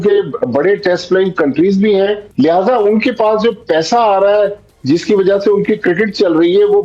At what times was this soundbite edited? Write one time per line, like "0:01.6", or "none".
none